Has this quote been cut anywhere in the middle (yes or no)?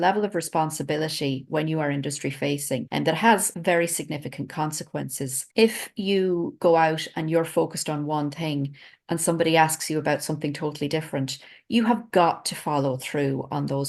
no